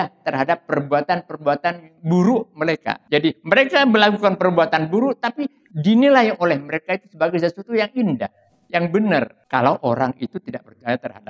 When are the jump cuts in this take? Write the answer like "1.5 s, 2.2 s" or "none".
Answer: 2.9 s, 9.4 s